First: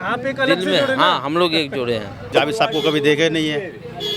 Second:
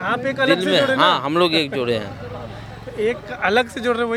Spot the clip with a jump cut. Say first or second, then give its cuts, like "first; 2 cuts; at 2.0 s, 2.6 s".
first; 1 cut; at 2.3 s